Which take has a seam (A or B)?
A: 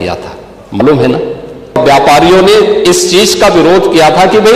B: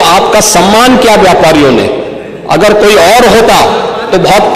A